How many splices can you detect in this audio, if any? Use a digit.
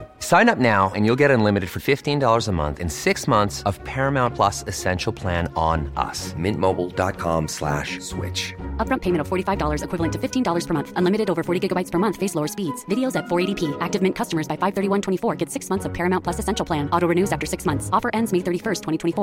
0